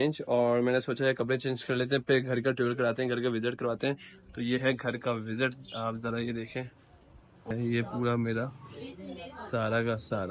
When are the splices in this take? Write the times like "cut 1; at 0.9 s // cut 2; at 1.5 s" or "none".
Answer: cut 1; at 7.5 s